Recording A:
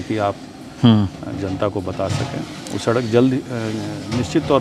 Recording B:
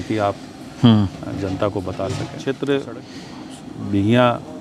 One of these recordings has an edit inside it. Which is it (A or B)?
B